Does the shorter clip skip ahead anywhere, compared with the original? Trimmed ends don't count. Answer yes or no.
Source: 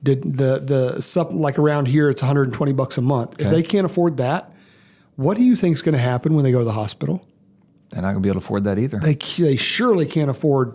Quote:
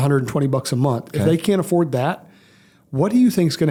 no